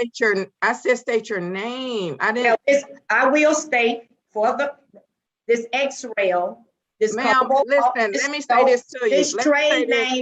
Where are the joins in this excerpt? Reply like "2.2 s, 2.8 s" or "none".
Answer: none